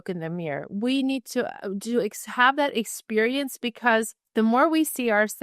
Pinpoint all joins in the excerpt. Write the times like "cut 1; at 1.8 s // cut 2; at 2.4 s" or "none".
cut 1; at 4.2 s

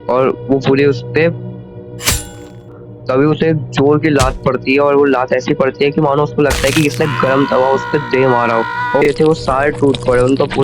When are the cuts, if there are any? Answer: cut 1; at 2.8 s // cut 2; at 9.0 s

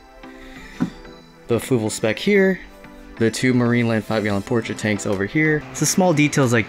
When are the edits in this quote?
cut 1; at 5.6 s

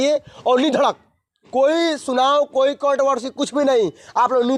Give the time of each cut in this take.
none

